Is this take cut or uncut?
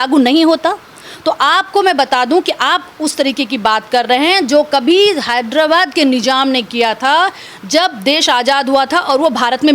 uncut